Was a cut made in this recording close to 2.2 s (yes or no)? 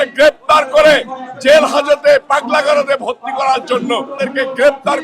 no